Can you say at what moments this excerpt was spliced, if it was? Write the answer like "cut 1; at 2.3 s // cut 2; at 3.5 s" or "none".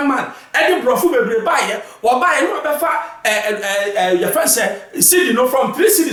none